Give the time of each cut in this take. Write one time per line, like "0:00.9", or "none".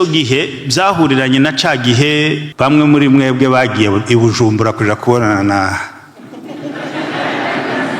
0:02.5